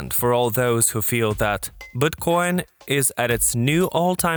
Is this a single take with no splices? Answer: yes; 0 cuts

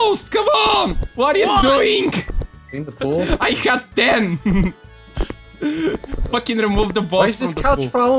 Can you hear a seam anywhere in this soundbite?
no; 0 cuts

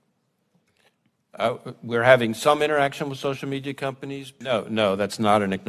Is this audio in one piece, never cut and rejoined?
no; 1 cut; at 4.3 s

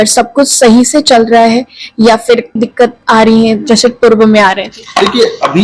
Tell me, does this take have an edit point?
no; 0 cuts

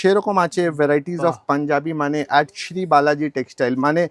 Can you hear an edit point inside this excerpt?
no; 0 cuts

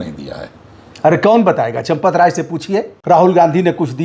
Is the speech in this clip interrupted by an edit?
yes; 1 cut; at 2.9 s

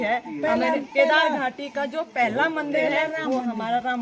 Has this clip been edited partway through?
no; 0 cuts

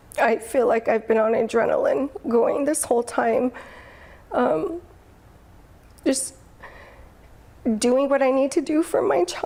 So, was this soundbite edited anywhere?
no; 0 cuts

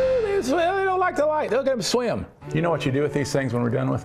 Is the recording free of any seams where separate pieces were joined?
no; 1 cut; at 2.3 s

